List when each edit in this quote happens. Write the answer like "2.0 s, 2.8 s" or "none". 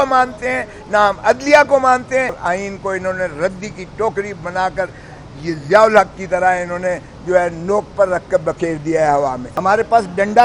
2.4 s, 9.5 s